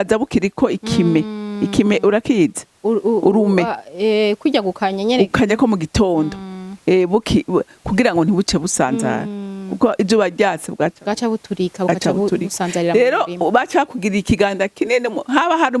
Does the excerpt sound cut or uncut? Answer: uncut